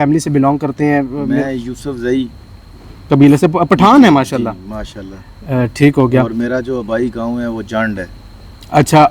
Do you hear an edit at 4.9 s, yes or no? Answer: no